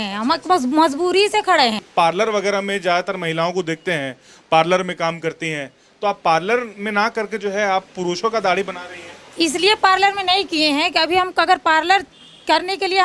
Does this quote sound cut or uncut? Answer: cut